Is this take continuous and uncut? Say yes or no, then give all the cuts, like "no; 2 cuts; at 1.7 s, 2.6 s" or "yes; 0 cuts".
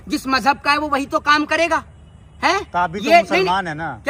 yes; 0 cuts